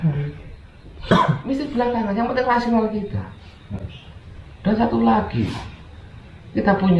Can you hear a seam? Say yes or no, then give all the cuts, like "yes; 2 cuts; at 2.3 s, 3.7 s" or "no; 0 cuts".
no; 0 cuts